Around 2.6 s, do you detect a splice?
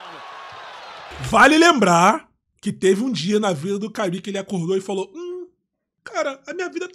no; 1 cut; at 1.1 s

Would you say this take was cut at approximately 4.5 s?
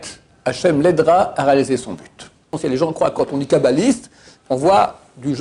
no; 1 cut; at 2.5 s

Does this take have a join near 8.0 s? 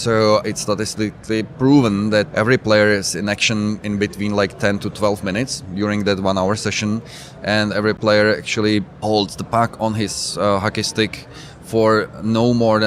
yes; 1 cut; at 8.0 s

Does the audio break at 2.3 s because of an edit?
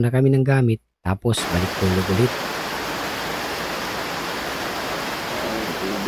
yes; 1 cut; at 2.3 s

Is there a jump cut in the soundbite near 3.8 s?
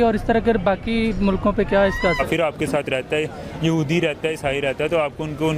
no; 1 cut; at 2.2 s

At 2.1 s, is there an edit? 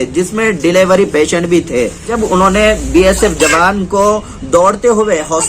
yes; 1 cut; at 2.1 s

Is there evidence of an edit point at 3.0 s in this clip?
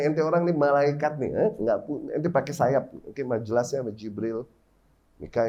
no; 0 cuts

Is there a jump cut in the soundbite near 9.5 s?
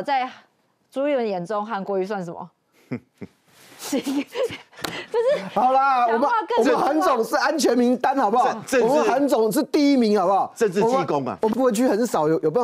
no; 1 cut; at 11.5 s

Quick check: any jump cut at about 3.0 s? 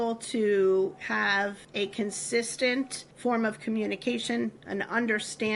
yes; 2 cuts; at 1.6 s, 3.0 s

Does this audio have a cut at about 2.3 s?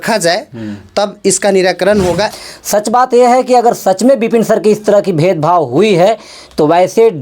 yes; 1 cut; at 2.3 s

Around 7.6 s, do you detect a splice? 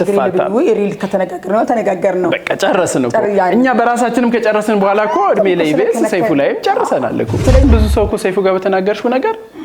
yes; 1 cut; at 7.6 s

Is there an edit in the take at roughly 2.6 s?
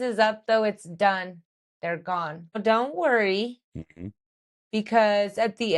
yes; 1 cut; at 2.6 s

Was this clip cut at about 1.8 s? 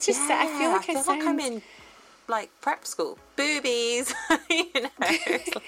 no; 0 cuts

